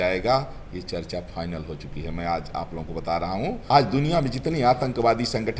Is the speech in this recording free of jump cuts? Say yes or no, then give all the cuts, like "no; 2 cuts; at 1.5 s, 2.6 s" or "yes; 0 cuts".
no; 1 cut; at 3.7 s